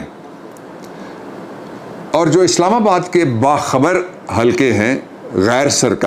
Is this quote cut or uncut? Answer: uncut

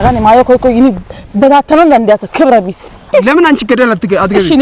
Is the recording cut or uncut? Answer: cut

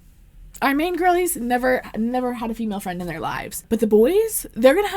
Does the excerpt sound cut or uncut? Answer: cut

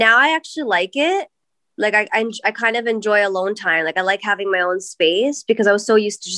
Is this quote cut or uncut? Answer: uncut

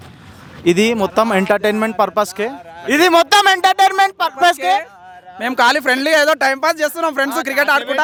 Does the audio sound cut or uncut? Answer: uncut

